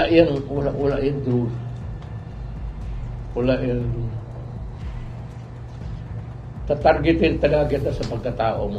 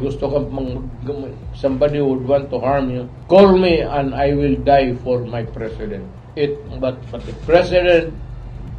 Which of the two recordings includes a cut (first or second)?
second